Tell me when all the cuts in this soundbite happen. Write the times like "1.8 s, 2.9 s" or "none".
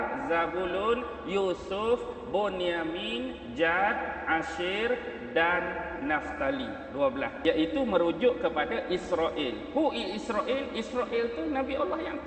7.4 s